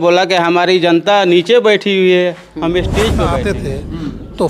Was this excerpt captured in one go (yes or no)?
no